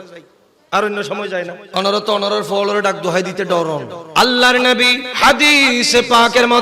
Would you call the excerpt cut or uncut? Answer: cut